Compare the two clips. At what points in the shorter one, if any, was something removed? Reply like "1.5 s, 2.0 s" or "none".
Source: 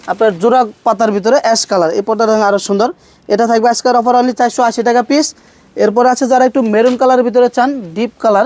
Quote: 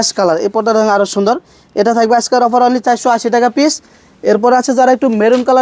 none